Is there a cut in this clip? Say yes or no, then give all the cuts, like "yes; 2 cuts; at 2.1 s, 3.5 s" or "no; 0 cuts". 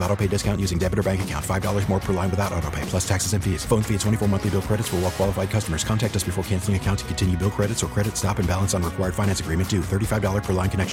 no; 0 cuts